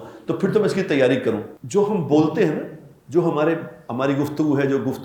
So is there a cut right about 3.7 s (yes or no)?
no